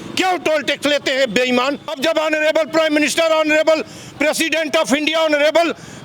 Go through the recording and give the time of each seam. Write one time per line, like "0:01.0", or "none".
0:01.9